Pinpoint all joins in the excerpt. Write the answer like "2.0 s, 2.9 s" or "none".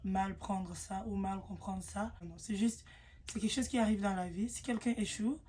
2.3 s